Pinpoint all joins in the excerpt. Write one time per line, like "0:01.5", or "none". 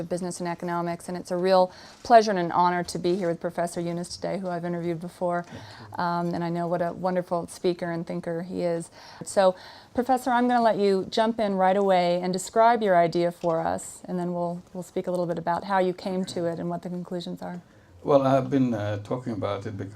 0:03.9

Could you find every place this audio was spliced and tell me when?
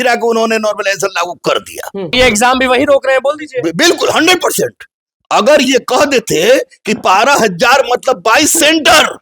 0:02.1

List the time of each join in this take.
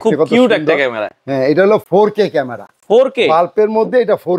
none

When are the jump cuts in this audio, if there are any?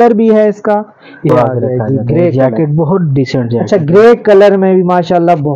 0:01.3

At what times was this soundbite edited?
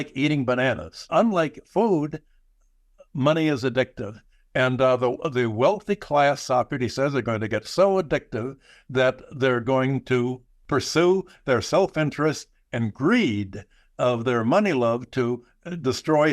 0:01.1
0:10.5

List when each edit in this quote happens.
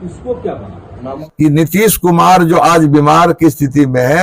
0:01.2

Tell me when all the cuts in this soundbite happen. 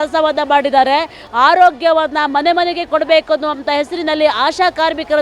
0:01.2

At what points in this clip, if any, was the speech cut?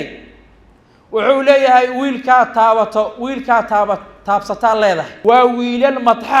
0:05.1

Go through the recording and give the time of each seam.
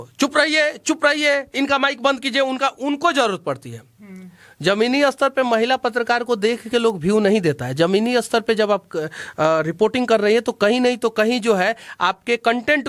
none

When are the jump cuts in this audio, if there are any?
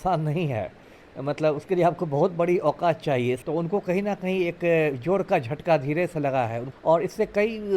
0:03.4
0:06.7

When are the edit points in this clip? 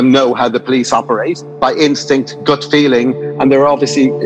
0:01.5
0:03.3

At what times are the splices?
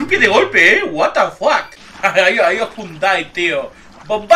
0:01.8

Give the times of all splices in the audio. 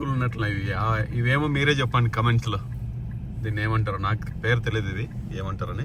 none

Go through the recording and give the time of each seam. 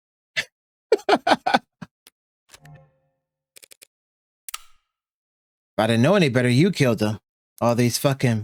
none

